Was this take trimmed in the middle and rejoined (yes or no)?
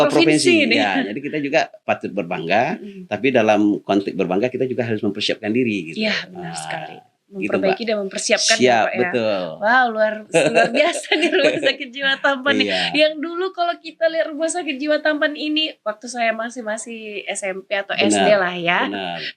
yes